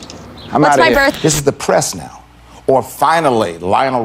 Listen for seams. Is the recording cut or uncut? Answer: cut